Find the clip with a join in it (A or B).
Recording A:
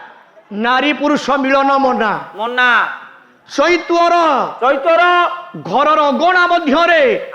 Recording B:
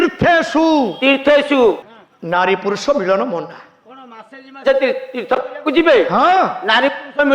B